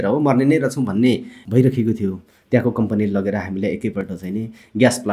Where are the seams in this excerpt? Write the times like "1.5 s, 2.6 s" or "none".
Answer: 1.4 s